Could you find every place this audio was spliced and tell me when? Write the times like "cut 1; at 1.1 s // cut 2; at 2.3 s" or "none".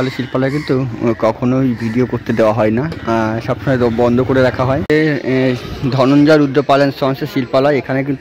cut 1; at 4.8 s